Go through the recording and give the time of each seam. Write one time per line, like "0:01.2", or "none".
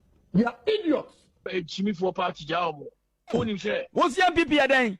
0:01.2